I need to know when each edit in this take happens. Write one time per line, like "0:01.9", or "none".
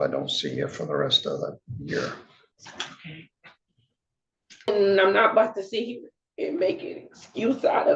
0:04.7